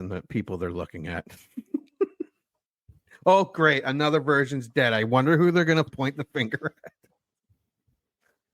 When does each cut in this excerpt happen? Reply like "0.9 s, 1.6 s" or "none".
5.9 s

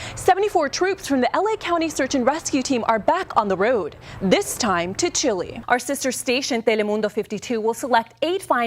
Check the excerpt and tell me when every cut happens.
5.5 s

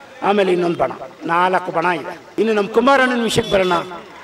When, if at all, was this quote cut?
2.2 s

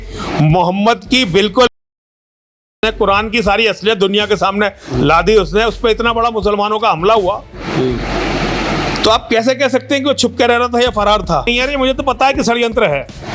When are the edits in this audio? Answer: 11.5 s

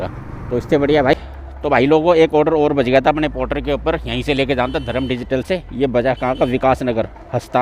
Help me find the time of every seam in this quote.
1.2 s

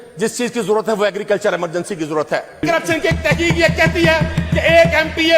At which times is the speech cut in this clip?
2.6 s

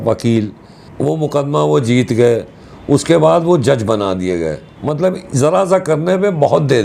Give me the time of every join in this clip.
0.9 s, 4.6 s

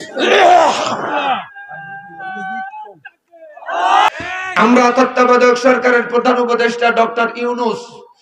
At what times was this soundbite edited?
4.1 s

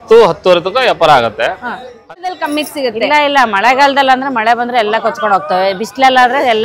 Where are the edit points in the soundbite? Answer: 2.3 s

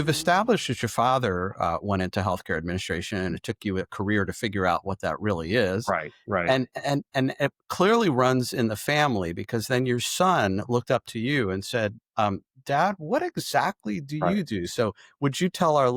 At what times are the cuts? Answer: none

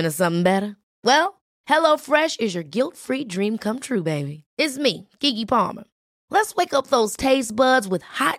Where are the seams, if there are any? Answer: none

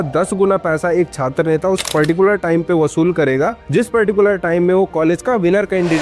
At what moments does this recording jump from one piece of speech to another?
none

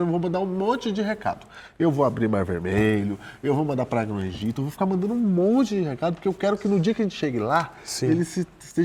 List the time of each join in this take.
none

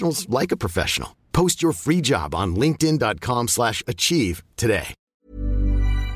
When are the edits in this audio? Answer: 5.1 s

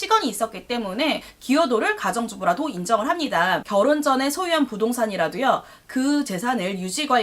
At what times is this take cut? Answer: 1.3 s, 3.6 s

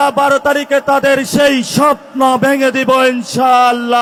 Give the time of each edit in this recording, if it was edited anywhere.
none

